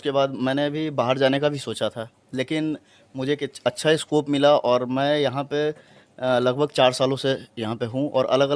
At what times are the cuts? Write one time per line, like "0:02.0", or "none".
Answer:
none